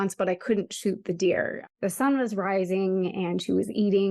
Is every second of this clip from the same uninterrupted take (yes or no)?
no